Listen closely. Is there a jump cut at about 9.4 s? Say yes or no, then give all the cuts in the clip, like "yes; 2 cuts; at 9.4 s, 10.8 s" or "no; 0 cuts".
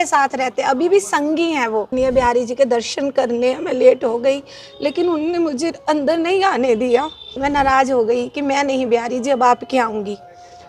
no; 2 cuts; at 1.9 s, 7.4 s